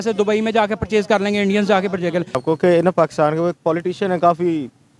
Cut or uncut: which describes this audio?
cut